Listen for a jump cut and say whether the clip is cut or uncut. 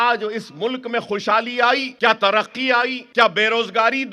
cut